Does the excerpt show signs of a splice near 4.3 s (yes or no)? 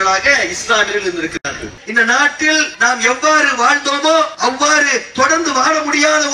yes